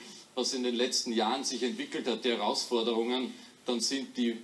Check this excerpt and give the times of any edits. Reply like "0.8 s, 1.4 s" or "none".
1.2 s